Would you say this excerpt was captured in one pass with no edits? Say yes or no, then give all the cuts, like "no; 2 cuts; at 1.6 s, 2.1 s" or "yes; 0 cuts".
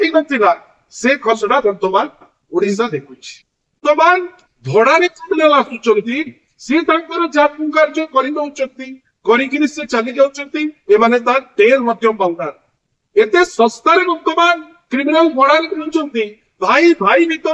no; 1 cut; at 3.8 s